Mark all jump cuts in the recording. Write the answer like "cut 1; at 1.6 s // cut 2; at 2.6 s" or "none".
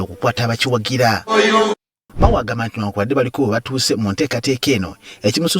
cut 1; at 2.0 s